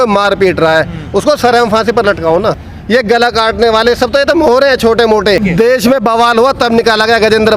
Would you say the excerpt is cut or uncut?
cut